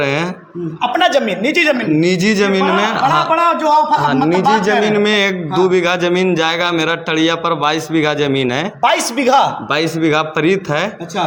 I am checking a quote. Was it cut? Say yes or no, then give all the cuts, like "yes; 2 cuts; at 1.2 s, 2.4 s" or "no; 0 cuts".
no; 0 cuts